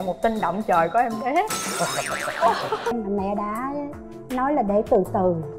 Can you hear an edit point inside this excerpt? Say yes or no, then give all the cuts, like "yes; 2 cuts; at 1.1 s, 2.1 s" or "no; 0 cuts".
yes; 1 cut; at 2.9 s